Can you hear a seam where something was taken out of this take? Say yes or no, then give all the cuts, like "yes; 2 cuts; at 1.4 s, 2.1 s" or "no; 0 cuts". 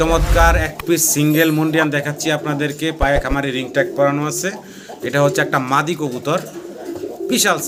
no; 0 cuts